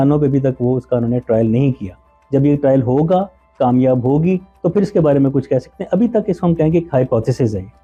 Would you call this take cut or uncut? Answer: uncut